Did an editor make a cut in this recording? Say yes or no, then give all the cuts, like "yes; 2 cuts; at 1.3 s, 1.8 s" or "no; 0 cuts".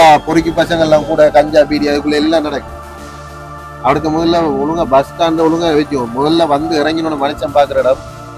no; 0 cuts